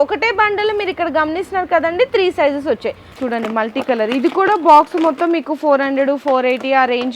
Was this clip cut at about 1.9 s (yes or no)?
no